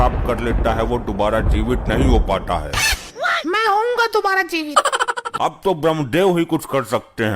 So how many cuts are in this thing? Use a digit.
1